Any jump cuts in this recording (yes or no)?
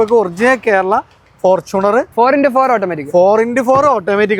yes